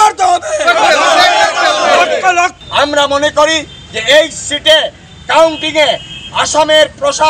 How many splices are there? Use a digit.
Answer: 1